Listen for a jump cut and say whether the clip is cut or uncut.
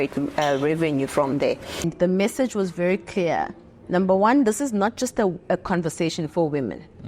cut